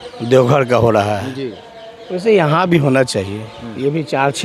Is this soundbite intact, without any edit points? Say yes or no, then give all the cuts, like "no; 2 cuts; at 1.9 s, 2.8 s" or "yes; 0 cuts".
yes; 0 cuts